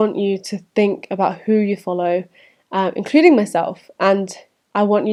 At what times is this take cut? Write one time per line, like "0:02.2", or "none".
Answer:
none